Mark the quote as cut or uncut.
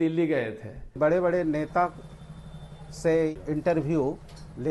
cut